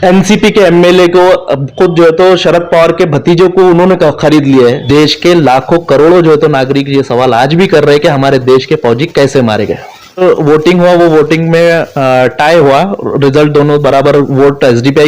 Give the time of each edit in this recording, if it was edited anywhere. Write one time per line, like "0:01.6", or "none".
0:04.8
0:10.2